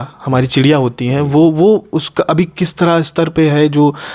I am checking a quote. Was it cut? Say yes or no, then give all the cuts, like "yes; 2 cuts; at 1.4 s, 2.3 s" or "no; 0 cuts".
no; 0 cuts